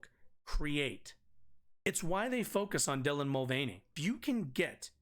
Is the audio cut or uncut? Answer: cut